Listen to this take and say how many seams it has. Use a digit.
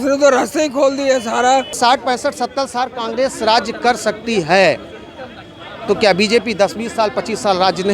1